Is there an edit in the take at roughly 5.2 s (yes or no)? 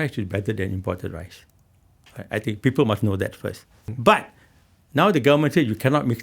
no